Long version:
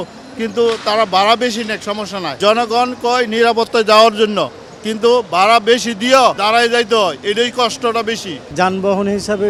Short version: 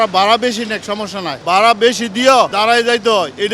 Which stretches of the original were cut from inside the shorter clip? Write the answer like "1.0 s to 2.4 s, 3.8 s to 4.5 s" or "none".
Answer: 2.4 s to 5.3 s